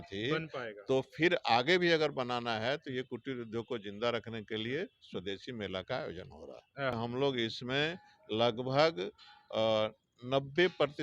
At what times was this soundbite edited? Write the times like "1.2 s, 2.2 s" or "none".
6.9 s